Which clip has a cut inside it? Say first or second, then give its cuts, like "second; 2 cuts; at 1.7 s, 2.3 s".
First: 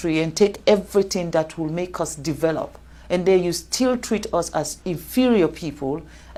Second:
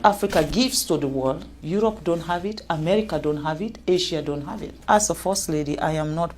second; 2 cuts; at 1.5 s, 4.8 s